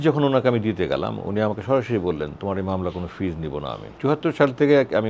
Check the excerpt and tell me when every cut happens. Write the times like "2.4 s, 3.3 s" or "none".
3.9 s